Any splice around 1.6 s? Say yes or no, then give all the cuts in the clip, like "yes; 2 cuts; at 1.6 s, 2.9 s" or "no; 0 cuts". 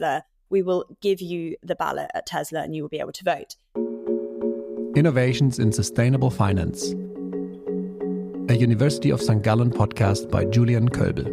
no; 1 cut; at 3.6 s